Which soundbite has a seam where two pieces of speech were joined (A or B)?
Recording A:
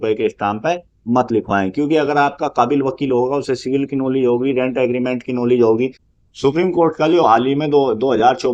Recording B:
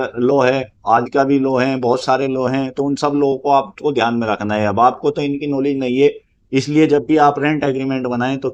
A